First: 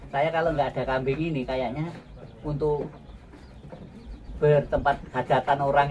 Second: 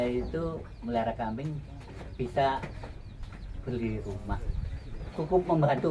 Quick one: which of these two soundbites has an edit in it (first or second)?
second